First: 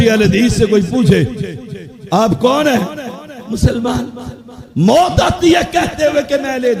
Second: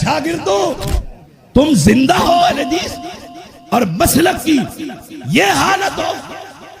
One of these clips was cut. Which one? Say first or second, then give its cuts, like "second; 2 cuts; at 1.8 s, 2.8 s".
second; 1 cut; at 0.9 s